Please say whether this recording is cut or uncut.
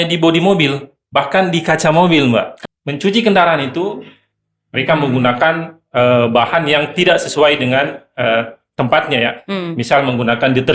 cut